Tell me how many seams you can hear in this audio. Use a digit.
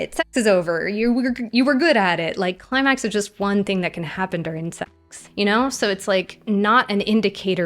2